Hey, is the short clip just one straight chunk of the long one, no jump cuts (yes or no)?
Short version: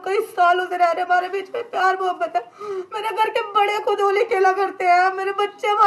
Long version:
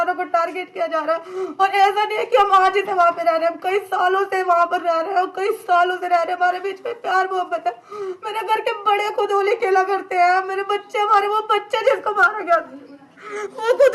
yes